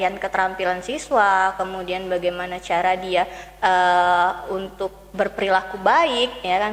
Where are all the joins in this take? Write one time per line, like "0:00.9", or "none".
none

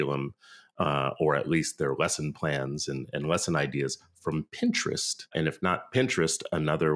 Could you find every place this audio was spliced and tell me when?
0:05.3

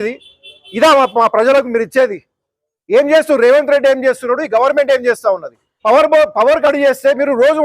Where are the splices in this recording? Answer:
0:05.7

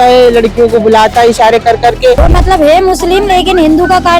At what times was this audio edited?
0:02.3

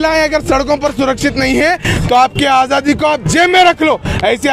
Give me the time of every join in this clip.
none

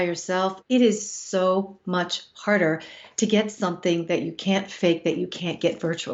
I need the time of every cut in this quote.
none

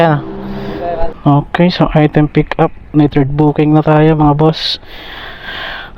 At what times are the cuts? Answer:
0:01.1

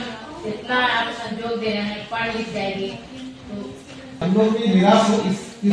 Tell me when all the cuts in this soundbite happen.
0:04.2

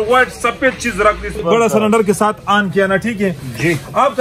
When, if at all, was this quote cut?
0:01.4

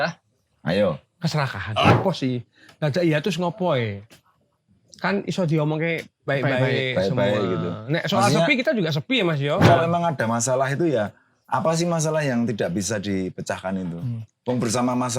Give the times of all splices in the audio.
0:01.9
0:09.7

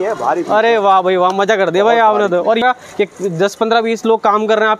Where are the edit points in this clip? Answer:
0:02.6

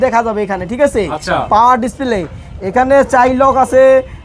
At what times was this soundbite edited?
none

